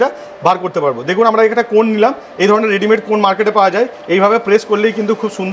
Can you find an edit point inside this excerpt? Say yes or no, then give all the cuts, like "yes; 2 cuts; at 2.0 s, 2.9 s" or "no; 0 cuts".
no; 0 cuts